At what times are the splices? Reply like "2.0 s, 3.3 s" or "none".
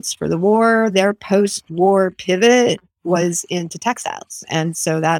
none